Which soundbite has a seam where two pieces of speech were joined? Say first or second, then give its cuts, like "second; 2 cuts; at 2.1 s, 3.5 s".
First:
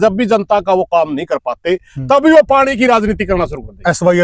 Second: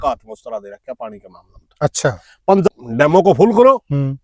second; 1 cut; at 2.7 s